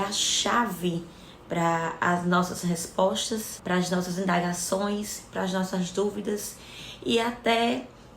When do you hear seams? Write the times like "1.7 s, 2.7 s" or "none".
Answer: 3.5 s